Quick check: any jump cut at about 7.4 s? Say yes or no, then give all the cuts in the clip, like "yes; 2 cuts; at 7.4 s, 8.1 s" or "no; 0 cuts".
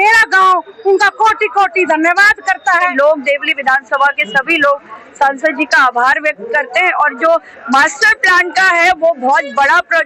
no; 1 cut; at 2.9 s